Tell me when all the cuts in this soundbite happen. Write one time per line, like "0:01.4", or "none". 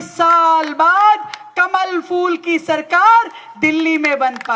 none

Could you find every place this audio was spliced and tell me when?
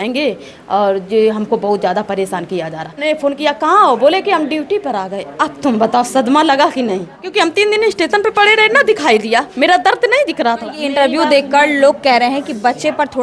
0:03.0
0:07.2
0:10.7

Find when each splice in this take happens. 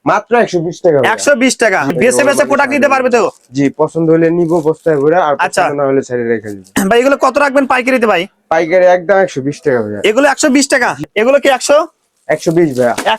0:01.9
0:06.6
0:11.0

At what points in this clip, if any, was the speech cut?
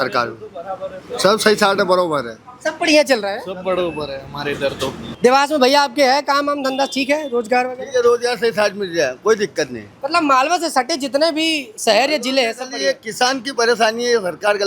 0:05.1

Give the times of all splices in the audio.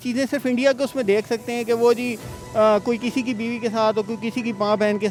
none

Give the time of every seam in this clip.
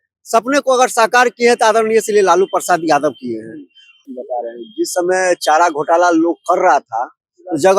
0:04.1

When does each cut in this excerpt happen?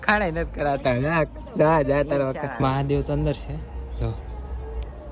0:02.6

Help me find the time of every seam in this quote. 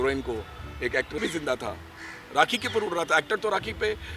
0:01.2

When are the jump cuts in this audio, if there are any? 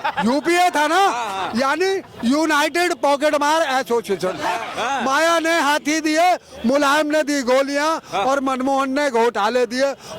0:04.7

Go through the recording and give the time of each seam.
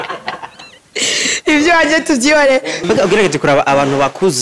0:02.7

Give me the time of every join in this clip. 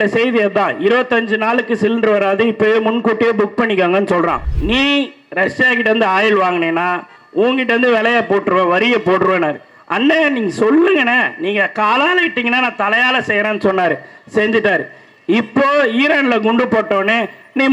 0:04.5

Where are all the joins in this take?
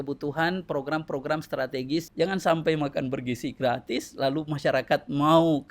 0:02.1

